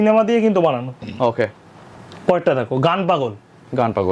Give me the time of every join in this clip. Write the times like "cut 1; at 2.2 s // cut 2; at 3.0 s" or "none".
none